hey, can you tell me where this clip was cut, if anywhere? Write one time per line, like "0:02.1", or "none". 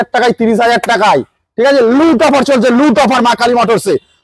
none

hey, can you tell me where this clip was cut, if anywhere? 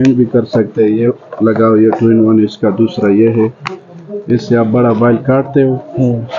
none

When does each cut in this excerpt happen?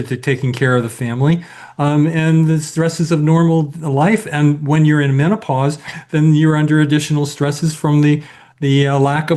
none

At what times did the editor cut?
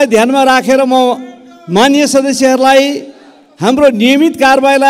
none

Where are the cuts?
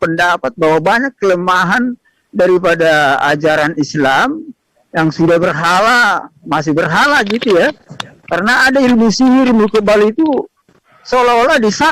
none

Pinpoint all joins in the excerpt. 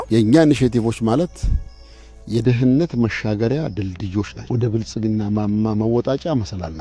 0:04.4

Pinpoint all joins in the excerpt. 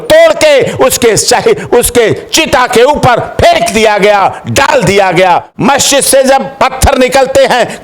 0:05.5

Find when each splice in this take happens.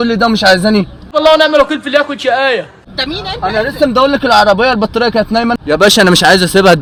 none

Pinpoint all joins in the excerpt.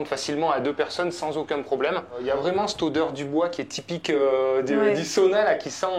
0:02.2

